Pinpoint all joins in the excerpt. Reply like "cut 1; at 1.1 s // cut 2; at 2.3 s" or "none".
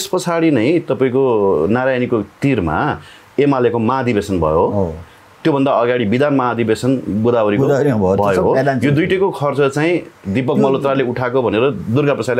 none